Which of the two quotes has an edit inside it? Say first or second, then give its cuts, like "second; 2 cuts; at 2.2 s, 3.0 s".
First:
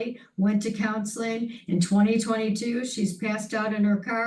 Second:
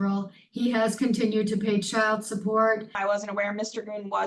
second; 1 cut; at 3.0 s